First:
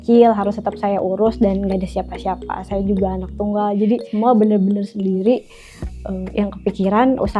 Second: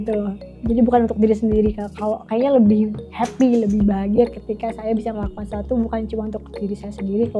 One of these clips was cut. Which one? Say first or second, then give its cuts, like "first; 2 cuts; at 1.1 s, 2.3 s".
first; 1 cut; at 4.1 s